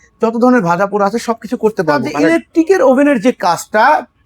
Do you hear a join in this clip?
yes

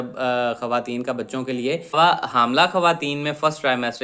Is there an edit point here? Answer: yes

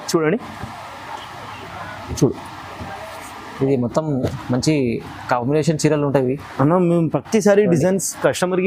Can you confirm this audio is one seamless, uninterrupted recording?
yes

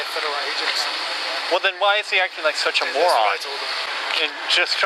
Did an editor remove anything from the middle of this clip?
yes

